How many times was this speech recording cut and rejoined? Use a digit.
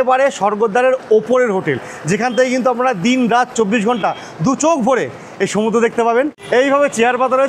1